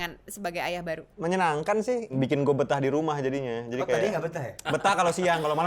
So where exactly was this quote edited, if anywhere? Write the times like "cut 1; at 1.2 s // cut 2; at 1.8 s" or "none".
cut 1; at 1.1 s // cut 2; at 2.1 s // cut 3; at 4.6 s